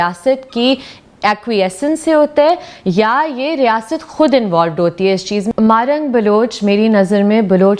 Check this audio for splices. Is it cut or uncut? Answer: cut